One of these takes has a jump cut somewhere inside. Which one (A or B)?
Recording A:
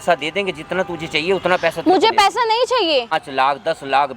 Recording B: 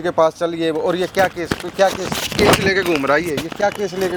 A